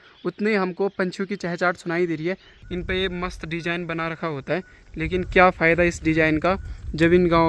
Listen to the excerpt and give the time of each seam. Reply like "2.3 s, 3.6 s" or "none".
2.5 s

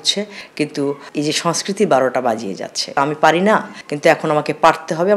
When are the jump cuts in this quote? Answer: 2.9 s

